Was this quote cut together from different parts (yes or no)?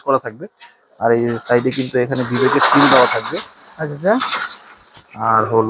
no